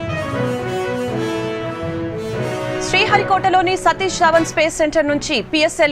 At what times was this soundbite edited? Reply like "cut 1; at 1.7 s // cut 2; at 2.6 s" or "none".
cut 1; at 2.8 s